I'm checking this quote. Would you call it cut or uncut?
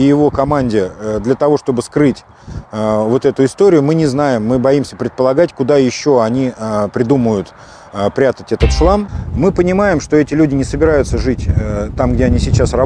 cut